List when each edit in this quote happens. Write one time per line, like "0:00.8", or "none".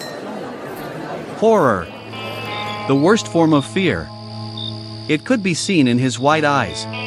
0:01.4